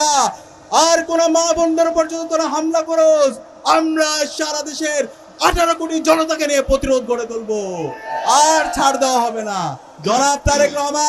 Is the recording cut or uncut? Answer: cut